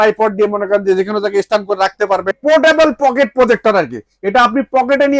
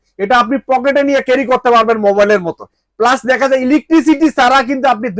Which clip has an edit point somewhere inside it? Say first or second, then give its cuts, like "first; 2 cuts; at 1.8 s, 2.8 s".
first; 1 cut; at 2.4 s